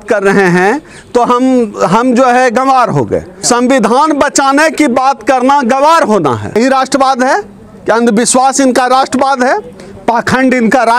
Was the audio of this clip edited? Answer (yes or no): yes